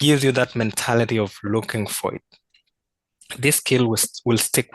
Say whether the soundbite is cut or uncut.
cut